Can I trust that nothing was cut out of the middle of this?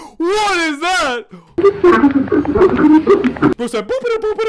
no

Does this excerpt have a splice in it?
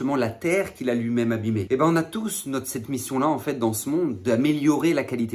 yes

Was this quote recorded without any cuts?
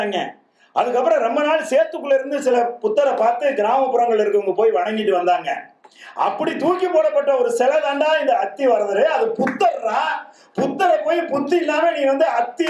yes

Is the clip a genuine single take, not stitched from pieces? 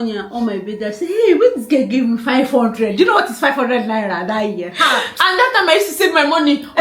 yes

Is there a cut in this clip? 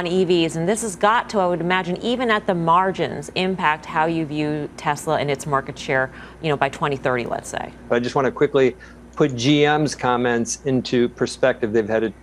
yes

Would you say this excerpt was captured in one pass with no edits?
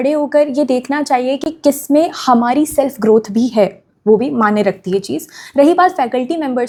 yes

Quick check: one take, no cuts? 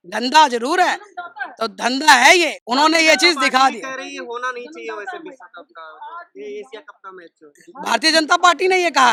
yes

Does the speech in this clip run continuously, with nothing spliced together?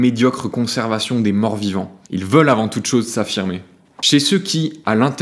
yes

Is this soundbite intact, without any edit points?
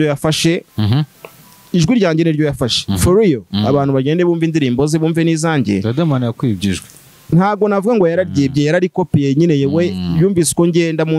yes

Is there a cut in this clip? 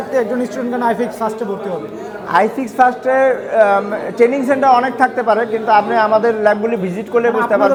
no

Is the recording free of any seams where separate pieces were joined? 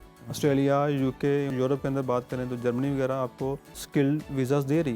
no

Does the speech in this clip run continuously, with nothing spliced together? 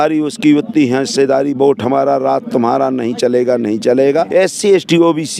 no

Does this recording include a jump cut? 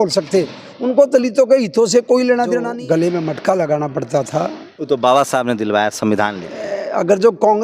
yes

